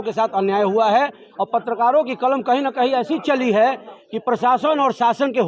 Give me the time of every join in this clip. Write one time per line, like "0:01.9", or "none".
none